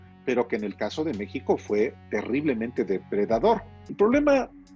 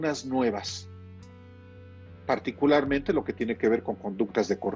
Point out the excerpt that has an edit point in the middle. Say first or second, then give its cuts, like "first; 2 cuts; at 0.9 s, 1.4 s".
first; 1 cut; at 3.8 s